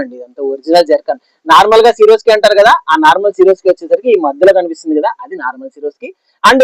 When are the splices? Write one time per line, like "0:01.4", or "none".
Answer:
none

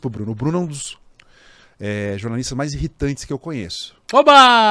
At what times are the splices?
none

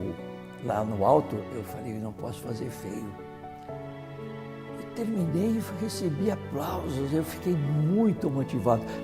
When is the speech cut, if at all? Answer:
0:01.4

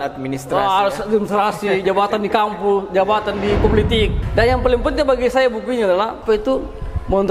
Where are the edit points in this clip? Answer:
0:04.2
0:06.2

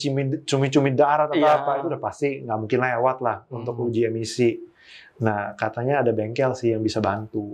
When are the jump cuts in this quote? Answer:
none

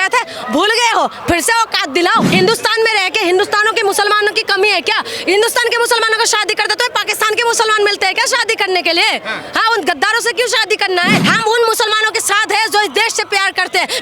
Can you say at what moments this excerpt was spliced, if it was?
0:02.3
0:11.2

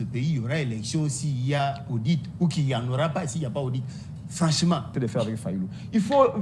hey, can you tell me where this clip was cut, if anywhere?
0:04.9

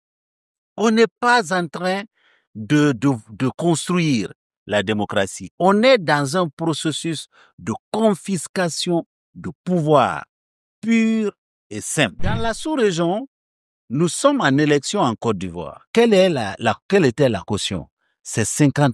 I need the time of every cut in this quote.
0:12.4

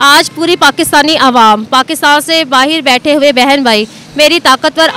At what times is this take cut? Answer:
none

